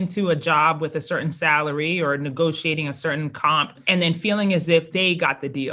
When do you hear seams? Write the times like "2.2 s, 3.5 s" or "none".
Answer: 3.8 s, 4.9 s